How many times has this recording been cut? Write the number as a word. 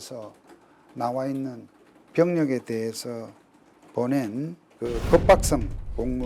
one